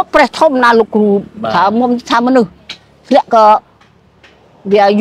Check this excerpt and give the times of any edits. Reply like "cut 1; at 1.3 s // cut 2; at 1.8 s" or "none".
none